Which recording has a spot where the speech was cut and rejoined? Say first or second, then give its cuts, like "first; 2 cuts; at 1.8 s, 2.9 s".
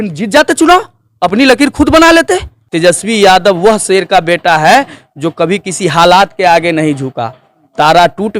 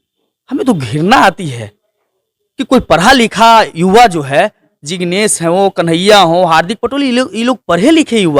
first; 1 cut; at 2.6 s